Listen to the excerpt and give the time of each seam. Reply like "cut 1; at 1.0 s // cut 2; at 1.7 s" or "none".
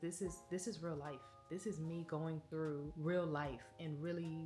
cut 1; at 2.9 s